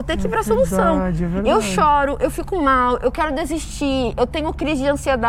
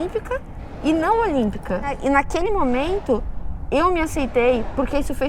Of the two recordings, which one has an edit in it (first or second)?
second